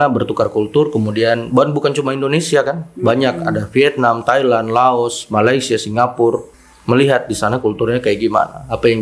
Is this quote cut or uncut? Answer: uncut